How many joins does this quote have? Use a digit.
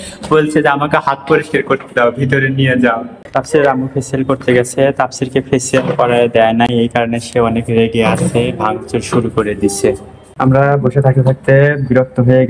2